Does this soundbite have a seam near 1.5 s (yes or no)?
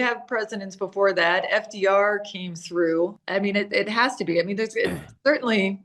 no